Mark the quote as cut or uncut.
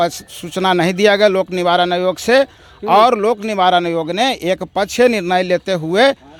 uncut